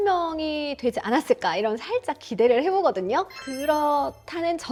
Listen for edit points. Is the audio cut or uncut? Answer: uncut